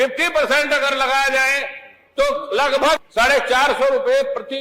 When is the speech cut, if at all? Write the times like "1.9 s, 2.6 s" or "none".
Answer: 3.0 s